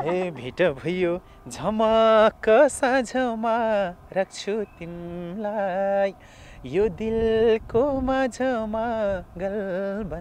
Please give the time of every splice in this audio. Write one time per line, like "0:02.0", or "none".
none

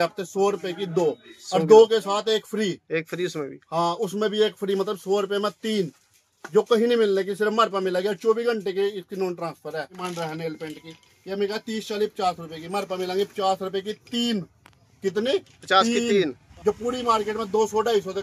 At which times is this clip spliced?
0:10.0
0:16.5

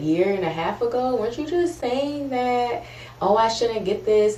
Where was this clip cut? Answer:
none

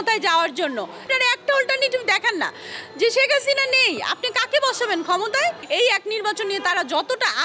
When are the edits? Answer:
0:01.1
0:05.6

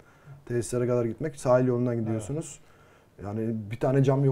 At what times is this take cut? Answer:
none

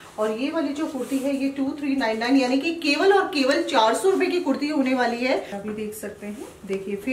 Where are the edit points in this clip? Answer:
0:05.5

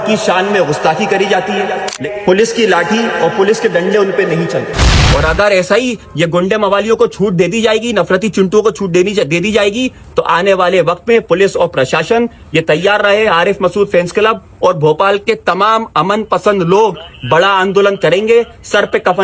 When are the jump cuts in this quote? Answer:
0:02.0

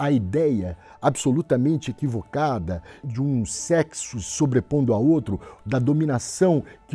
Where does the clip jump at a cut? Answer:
0:03.1

